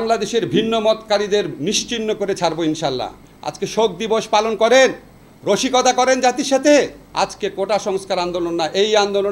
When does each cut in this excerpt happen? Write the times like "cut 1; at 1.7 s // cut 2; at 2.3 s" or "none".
cut 1; at 3.1 s // cut 2; at 7.0 s